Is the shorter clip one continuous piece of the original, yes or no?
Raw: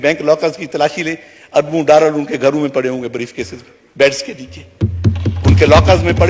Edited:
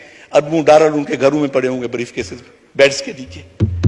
yes